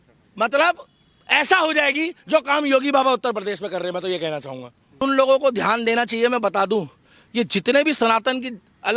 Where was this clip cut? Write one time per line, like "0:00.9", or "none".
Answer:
0:05.0